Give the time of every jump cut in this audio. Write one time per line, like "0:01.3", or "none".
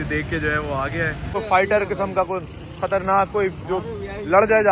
0:01.3